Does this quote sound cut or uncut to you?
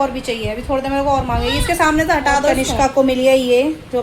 cut